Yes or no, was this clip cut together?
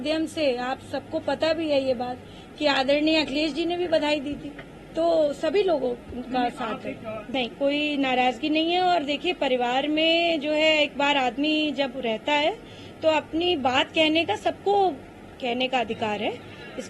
yes